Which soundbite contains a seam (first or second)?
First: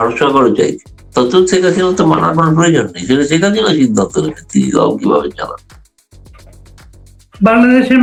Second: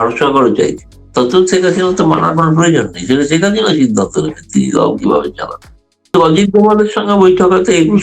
second